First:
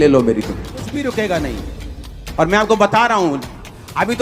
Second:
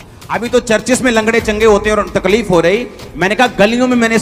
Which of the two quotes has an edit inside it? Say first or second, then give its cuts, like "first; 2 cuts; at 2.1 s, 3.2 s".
first; 1 cut; at 0.9 s